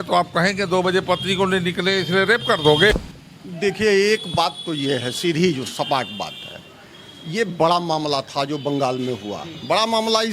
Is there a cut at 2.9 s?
yes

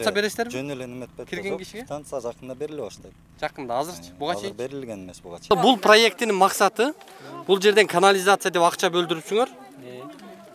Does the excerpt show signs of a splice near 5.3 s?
yes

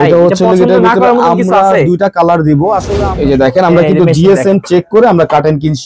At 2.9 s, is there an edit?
yes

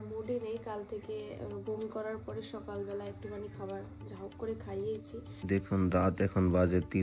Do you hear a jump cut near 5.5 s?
yes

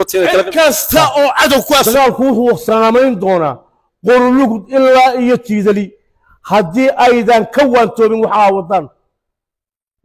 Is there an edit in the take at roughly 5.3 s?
no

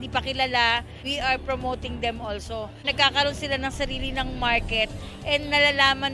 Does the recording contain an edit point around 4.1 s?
no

